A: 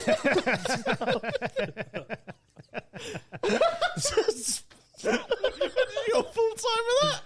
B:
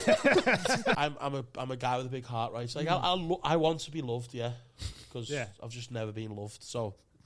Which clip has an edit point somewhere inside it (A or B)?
B